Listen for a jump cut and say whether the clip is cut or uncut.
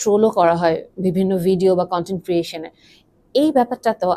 uncut